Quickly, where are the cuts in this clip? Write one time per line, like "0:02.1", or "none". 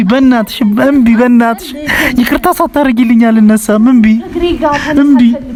none